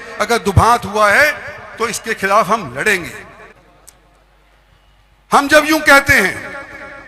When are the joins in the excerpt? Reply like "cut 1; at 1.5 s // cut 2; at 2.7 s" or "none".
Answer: cut 1; at 3.5 s